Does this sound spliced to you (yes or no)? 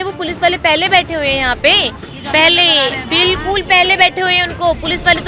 no